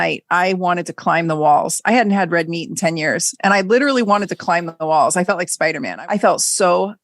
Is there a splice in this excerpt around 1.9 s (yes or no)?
no